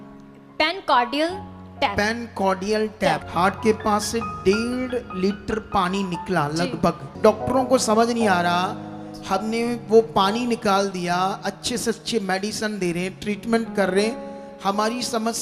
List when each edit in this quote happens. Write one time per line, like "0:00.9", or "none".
0:03.3
0:07.1